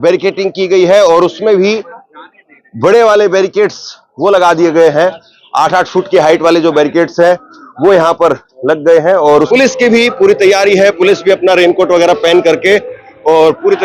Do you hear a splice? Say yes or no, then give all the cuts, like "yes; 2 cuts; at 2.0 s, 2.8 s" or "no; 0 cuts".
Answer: yes; 1 cut; at 9.5 s